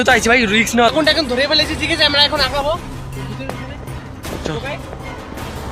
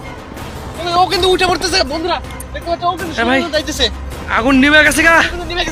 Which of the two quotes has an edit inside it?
first; 1 cut; at 0.9 s

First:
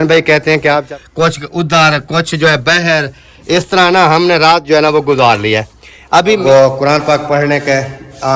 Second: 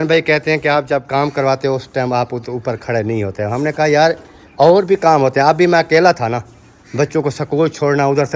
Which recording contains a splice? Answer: first; 2 cuts; at 0.8 s, 6.4 s

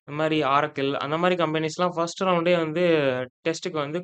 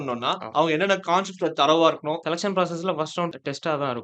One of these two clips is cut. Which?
second; 1 cut; at 2.2 s

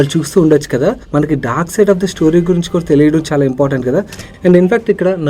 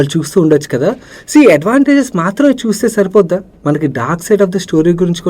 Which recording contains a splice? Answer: first; 2 cuts; at 1.0 s, 4.2 s

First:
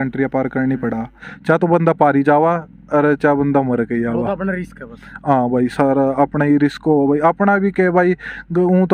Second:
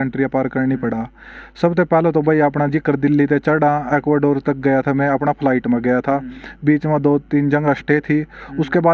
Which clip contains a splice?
first; 1 cut; at 1.3 s

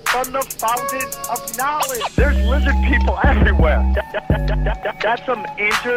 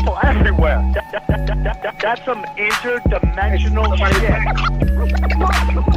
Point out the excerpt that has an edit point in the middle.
first; 1 cut; at 1.4 s

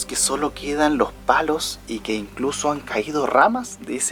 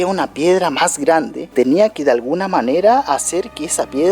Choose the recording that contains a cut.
second; 1 cut; at 1.5 s

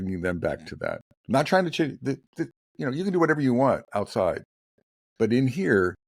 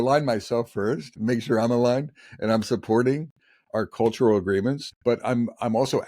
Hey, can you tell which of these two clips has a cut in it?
second; 2 cuts; at 1.1 s, 4.9 s

